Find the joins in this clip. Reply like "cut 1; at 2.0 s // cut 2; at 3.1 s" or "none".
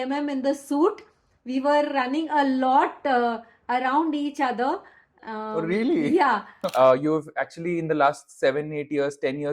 cut 1; at 6.6 s